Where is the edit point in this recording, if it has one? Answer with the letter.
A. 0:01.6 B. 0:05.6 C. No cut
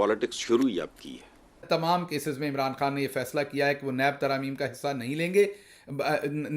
A